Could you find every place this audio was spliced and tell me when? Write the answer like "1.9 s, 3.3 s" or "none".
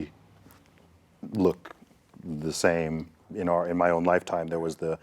3.3 s